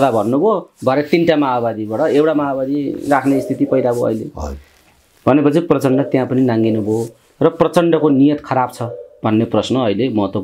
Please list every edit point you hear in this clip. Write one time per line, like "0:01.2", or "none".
none

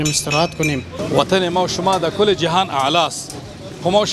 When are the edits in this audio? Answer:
0:00.9

